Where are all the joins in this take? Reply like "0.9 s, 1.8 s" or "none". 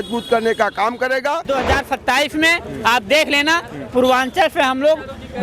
1.5 s